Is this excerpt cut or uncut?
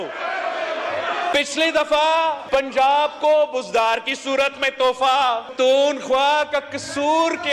cut